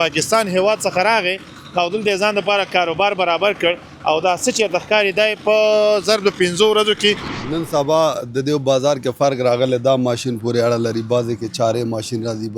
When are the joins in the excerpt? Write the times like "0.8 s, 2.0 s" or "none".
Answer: 7.3 s

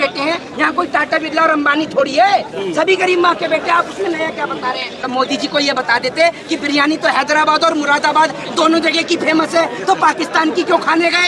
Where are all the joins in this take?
5.0 s

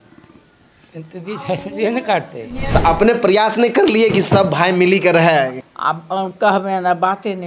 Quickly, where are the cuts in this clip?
2.7 s, 5.6 s

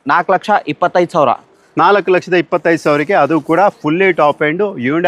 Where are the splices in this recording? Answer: none

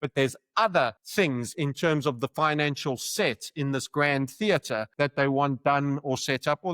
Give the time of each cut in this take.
1.0 s, 4.9 s

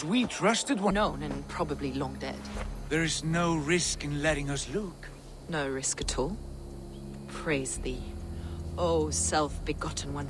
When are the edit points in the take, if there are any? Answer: 0.9 s

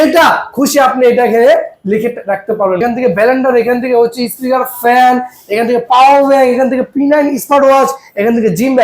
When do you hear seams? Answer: 2.8 s

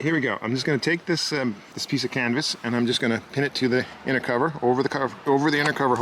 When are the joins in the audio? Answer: 1.7 s

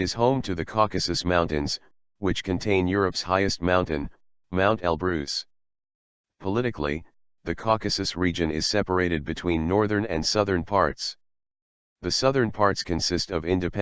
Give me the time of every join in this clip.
11.9 s

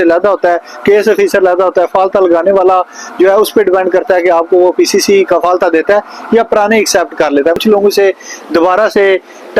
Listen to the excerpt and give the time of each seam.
7.6 s

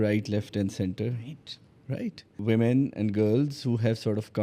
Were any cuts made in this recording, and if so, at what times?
2.4 s

